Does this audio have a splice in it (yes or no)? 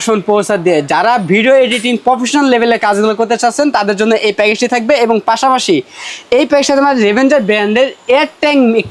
no